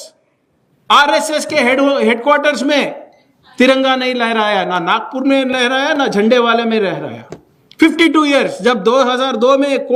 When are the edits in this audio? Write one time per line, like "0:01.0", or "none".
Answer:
none